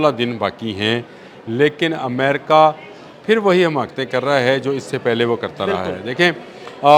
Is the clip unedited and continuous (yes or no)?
yes